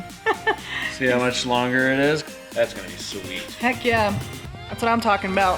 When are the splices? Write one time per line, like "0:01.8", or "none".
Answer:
0:02.3